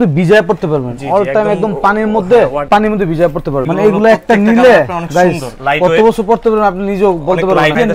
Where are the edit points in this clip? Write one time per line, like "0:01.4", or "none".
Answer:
0:03.6

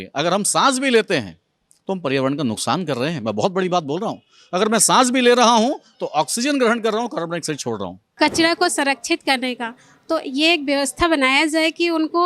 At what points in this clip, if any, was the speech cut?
0:08.0

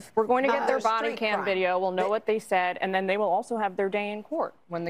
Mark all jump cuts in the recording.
0:02.7

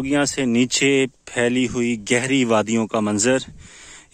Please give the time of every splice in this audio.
none

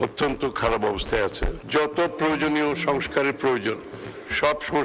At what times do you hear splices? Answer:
0:01.5

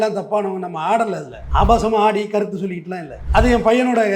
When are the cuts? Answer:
0:01.3
0:03.2

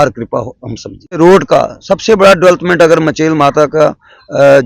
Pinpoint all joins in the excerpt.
0:01.2

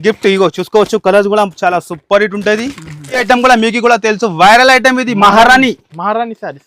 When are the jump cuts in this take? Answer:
0:03.2

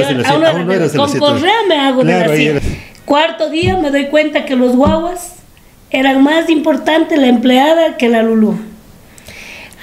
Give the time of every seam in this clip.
0:02.6

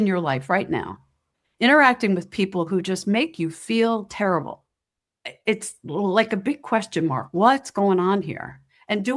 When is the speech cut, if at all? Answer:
none

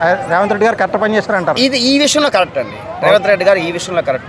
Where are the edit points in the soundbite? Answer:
none

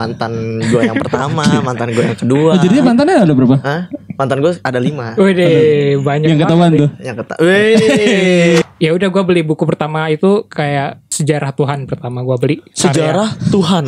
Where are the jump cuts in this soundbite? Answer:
0:08.6
0:11.0

